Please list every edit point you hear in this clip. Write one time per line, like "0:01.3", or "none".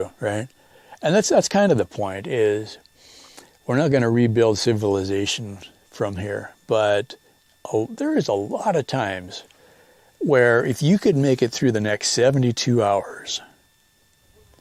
none